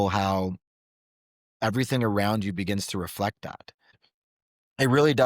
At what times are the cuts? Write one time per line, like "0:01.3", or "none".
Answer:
0:04.1